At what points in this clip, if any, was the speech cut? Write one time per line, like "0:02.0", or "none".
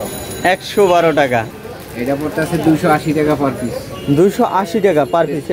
0:01.6